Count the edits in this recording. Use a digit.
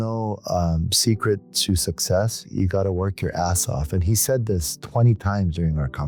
0